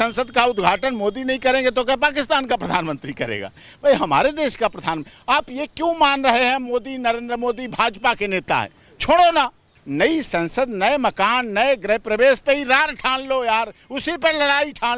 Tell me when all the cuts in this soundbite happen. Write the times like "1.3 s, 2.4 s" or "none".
9.7 s